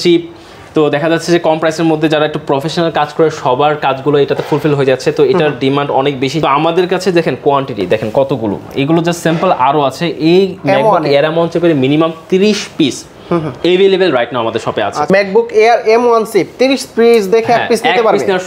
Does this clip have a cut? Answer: no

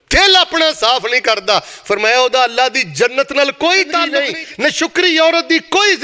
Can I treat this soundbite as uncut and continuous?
no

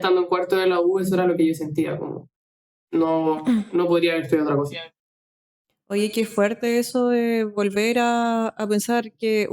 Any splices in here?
no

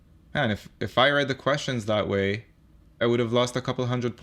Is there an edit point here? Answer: yes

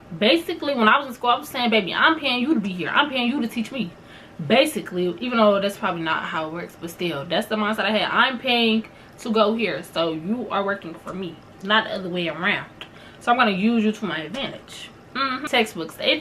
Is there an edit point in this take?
no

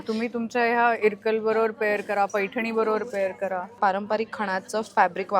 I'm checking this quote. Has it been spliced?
yes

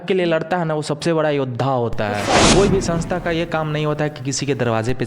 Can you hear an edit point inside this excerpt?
yes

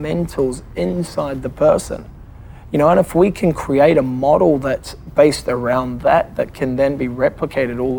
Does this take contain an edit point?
no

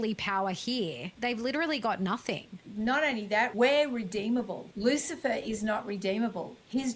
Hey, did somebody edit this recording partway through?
yes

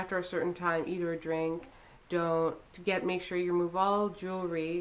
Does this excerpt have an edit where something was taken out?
no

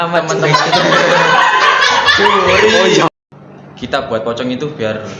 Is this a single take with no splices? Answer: no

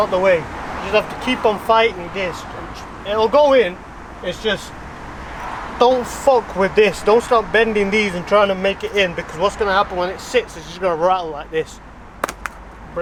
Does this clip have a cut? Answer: no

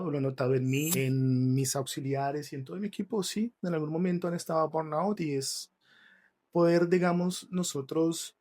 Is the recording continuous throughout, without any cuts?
no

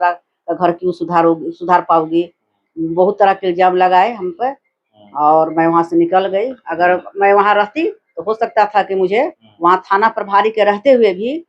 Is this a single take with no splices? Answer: no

